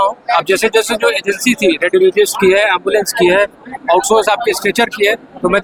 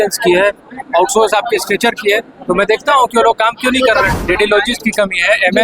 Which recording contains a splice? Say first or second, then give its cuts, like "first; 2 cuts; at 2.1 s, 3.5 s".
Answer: second; 1 cut; at 4.1 s